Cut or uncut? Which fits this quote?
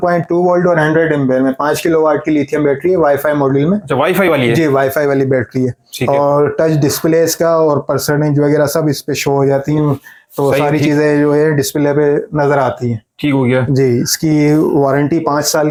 uncut